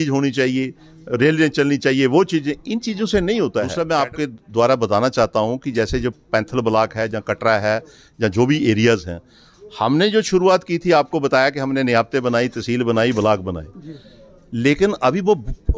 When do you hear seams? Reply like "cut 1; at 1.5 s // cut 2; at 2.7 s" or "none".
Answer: cut 1; at 3.7 s